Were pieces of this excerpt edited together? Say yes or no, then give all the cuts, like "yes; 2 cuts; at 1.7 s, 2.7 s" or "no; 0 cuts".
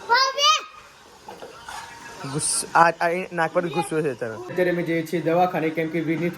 yes; 1 cut; at 4.5 s